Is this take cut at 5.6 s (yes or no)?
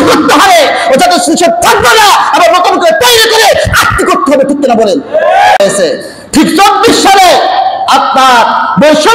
yes